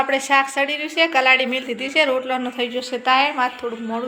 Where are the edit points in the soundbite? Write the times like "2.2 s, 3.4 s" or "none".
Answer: none